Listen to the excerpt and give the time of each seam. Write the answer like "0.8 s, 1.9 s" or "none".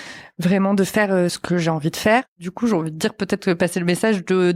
1.4 s, 2.4 s